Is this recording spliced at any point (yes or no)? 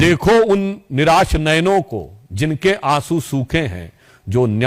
no